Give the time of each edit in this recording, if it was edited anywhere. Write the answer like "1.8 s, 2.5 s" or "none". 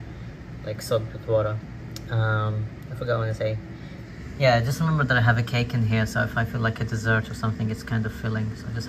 none